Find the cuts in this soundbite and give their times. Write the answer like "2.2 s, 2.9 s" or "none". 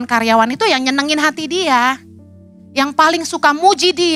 none